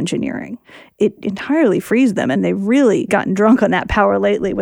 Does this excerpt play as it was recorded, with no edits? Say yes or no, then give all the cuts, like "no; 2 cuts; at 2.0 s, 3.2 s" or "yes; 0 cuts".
no; 3 cuts; at 1.0 s, 2.4 s, 3.1 s